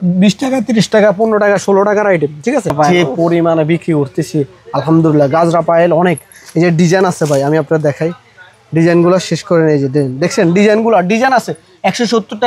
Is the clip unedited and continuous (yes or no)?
no